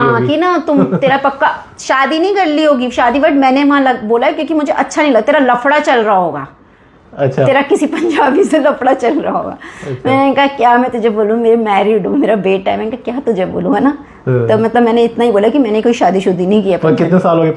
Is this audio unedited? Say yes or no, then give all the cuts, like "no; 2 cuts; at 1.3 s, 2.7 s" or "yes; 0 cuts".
yes; 0 cuts